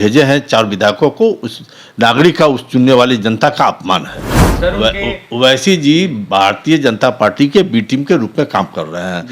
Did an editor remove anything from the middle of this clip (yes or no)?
yes